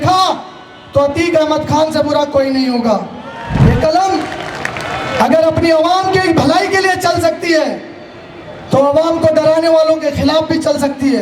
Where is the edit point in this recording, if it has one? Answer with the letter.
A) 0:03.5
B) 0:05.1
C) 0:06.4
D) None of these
A